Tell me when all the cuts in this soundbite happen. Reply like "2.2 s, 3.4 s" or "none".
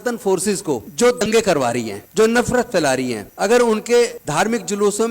1.2 s